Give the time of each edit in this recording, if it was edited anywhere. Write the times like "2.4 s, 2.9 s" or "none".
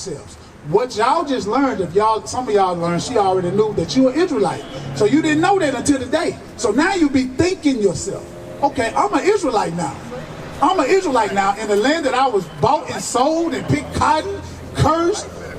none